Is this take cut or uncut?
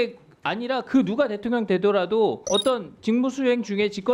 cut